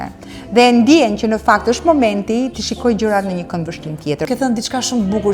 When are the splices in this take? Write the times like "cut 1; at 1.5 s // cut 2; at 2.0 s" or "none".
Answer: cut 1; at 4.2 s